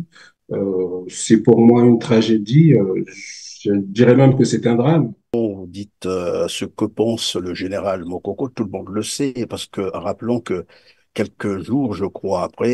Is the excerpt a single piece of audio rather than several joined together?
no; 1 cut; at 5.5 s

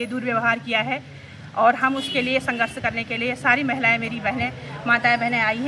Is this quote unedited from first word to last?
yes; 0 cuts

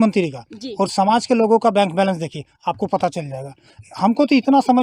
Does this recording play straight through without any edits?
yes; 0 cuts

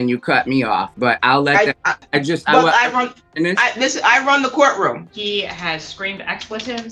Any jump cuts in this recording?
yes; 3 cuts; at 0.9 s, 1.9 s, 5.1 s

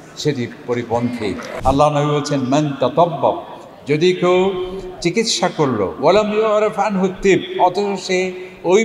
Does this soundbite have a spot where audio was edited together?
yes; 1 cut; at 1.5 s

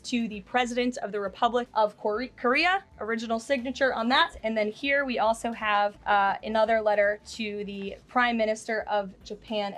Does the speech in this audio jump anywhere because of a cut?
yes; 4 cuts; at 1.7 s, 2.9 s, 4.4 s, 6.0 s

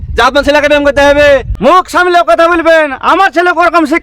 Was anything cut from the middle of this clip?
yes; 1 cut; at 1.5 s

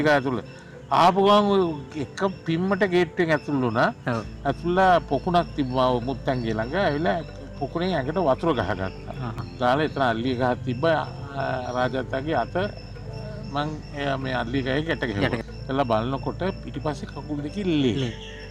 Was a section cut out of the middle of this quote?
yes; 2 cuts; at 9.4 s, 15.4 s

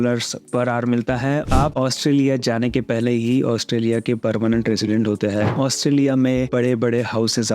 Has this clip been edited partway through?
yes; 2 cuts; at 1.5 s, 5.5 s

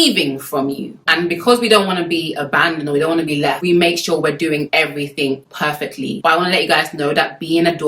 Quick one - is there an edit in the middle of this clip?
yes; 1 cut; at 0.9 s

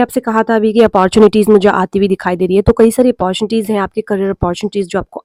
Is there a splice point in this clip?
no; 0 cuts

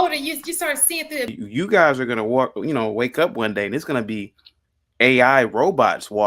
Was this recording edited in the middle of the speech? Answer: yes; 1 cut; at 1.3 s

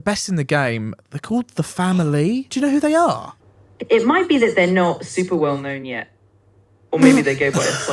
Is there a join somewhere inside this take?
yes; 1 cut; at 2.5 s

